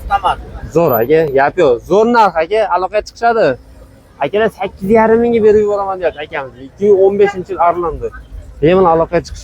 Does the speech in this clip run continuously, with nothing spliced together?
yes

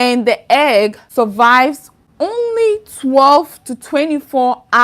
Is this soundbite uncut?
no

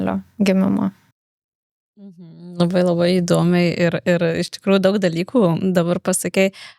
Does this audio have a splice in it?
no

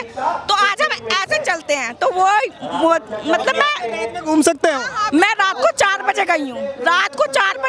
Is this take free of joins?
yes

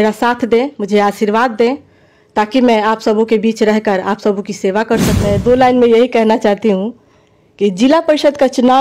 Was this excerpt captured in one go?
no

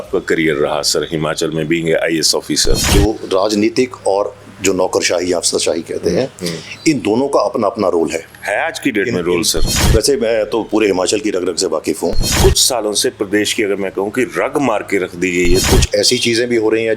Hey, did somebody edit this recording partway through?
yes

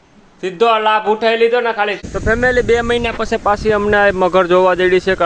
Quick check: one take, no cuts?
no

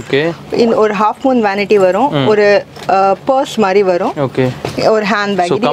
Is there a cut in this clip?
no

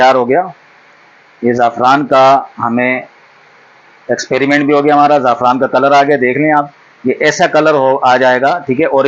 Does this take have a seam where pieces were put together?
no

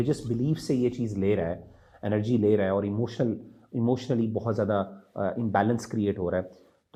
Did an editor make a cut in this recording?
no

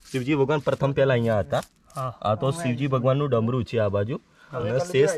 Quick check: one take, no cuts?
yes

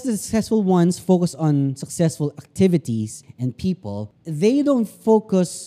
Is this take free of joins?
no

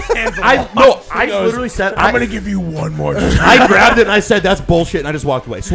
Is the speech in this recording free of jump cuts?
yes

